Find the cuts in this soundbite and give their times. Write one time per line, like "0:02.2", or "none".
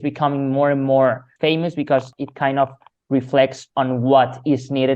0:01.3
0:02.1

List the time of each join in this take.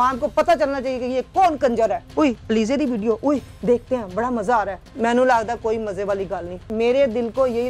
0:02.1
0:04.8
0:06.7

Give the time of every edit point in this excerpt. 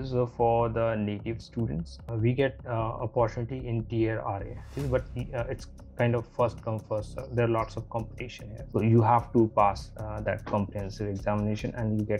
0:02.0
0:04.7
0:08.5

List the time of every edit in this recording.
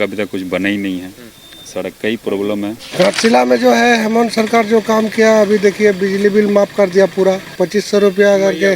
0:02.8
0:07.5

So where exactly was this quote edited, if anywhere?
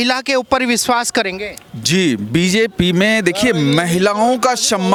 none

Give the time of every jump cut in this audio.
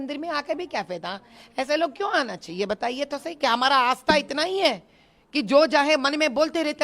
none

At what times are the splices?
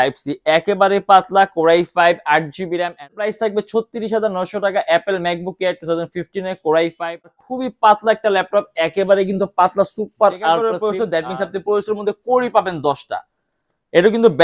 0:03.3
0:07.3
0:10.7

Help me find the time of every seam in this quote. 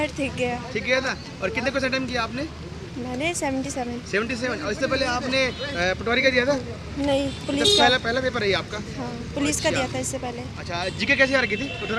none

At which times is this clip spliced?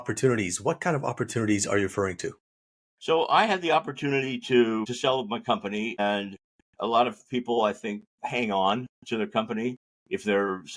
none

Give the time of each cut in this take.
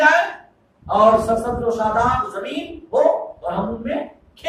none

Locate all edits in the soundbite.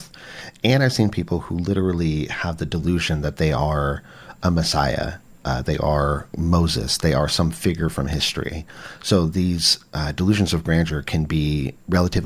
none

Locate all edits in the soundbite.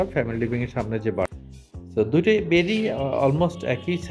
0:01.2

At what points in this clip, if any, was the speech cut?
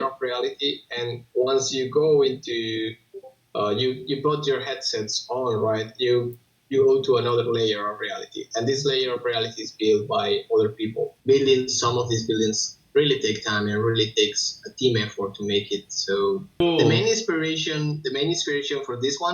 0:11.1
0:16.5

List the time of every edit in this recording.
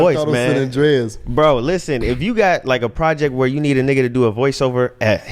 none

